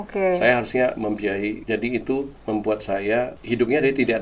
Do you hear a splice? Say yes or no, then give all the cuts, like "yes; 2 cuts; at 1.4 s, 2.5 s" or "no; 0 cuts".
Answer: yes; 3 cuts; at 1.6 s, 2.3 s, 3.4 s